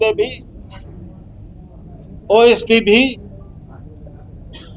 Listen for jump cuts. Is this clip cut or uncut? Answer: uncut